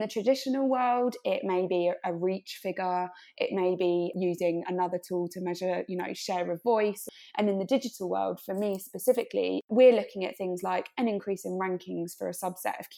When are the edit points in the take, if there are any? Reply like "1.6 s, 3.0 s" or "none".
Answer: 4.1 s, 7.0 s, 9.6 s